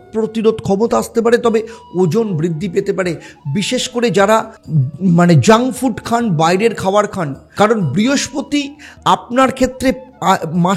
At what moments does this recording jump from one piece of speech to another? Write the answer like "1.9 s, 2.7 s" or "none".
4.6 s, 7.4 s